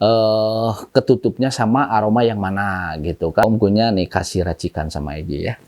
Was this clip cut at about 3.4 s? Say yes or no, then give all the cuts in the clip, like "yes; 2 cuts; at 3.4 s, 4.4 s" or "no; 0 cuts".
yes; 1 cut; at 3.4 s